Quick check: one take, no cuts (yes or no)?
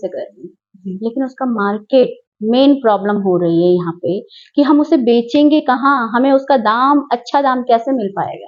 yes